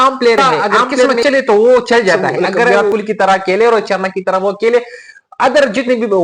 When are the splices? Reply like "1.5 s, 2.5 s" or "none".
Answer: 1.2 s, 2.8 s